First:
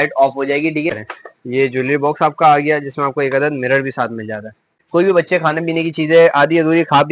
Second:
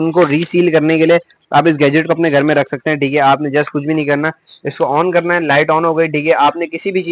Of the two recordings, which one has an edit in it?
first; 2 cuts; at 1.1 s, 4.7 s

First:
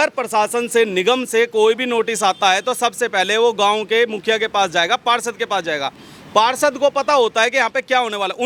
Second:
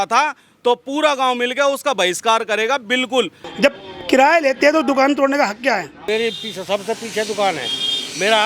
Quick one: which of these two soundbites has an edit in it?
second; 2 cuts; at 3.4 s, 5.9 s

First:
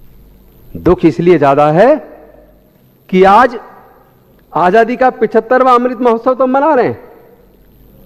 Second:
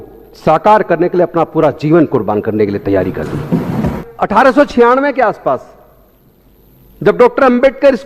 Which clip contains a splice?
second; 1 cut; at 3.9 s

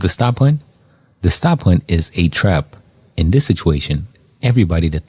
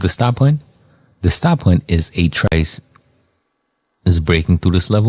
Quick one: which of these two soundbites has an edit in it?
second; 1 cut; at 2.5 s

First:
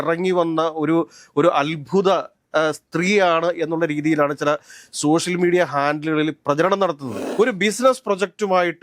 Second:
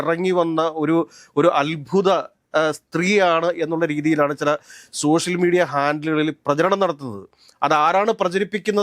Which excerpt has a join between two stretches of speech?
first; 1 cut; at 7.1 s

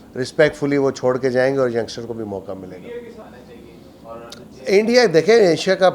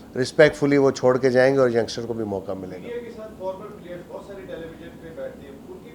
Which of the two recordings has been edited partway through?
first; 1 cut; at 3.2 s

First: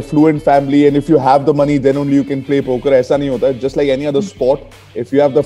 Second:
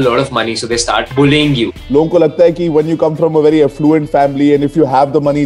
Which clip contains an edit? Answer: second; 2 cuts; at 1.1 s, 1.8 s

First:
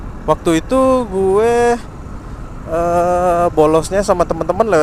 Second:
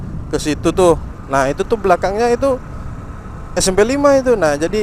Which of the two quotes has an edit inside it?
second; 1 cut; at 1.1 s

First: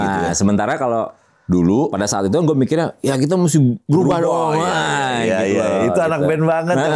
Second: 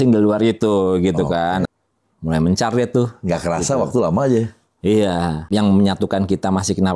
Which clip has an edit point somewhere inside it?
second; 2 cuts; at 1.6 s, 5.4 s

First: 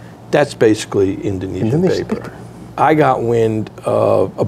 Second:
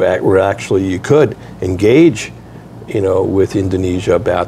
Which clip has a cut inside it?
first; 1 cut; at 2.6 s

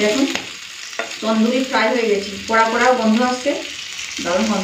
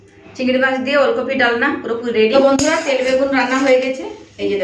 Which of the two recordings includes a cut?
second; 1 cut; at 2.3 s

